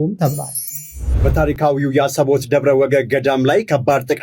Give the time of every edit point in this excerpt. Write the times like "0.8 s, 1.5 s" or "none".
1.2 s